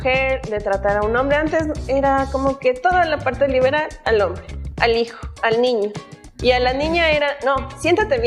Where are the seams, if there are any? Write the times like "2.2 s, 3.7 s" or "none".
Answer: none